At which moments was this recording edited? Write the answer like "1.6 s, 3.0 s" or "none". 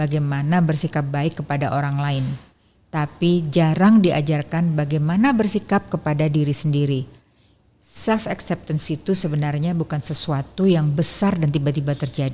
7.6 s